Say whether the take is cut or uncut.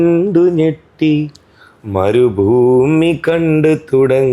uncut